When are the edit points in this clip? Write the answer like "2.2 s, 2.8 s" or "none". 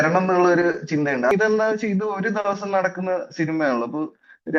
1.3 s